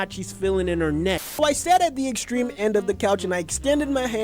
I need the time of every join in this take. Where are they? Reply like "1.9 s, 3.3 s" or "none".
1.4 s